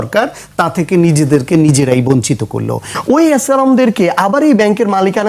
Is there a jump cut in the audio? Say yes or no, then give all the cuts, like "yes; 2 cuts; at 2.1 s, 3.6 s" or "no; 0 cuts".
yes; 1 cut; at 2.9 s